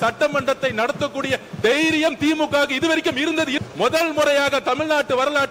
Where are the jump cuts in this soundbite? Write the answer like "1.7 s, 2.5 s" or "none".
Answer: 3.5 s